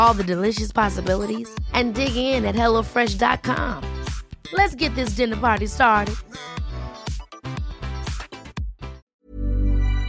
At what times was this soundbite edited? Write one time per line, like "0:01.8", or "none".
0:09.0